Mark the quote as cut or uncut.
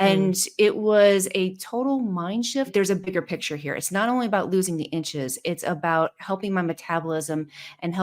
cut